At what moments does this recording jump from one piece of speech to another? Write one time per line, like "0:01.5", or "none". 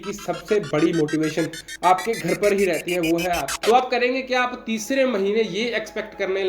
0:03.5